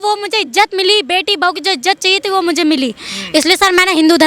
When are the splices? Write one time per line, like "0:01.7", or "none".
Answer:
none